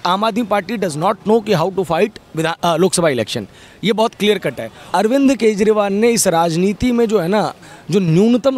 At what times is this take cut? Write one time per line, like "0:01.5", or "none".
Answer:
0:04.7